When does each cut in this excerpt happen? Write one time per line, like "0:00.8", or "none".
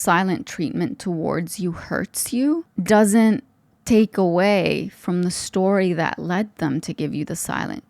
0:02.7